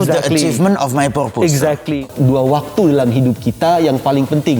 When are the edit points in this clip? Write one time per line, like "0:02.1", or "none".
0:02.0